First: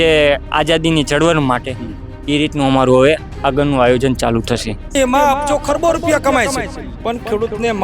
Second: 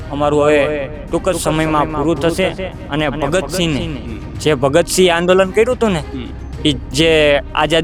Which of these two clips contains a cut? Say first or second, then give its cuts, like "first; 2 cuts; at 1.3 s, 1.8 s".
first; 1 cut; at 4.9 s